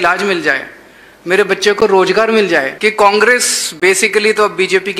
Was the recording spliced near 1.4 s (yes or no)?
no